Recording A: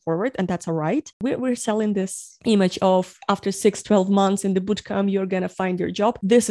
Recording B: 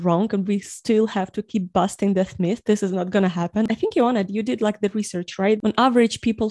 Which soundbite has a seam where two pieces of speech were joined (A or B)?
B